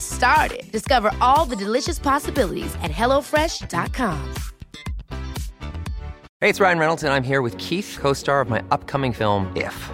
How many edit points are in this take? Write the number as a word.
one